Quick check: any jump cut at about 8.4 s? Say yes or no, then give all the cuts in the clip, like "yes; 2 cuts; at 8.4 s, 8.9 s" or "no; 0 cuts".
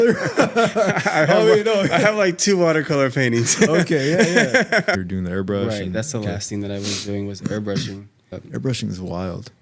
yes; 2 cuts; at 5.0 s, 8.4 s